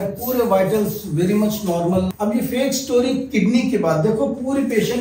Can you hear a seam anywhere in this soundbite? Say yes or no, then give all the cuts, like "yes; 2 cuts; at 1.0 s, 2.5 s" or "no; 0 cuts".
yes; 1 cut; at 2.1 s